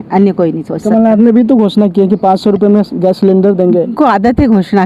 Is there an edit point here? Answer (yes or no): yes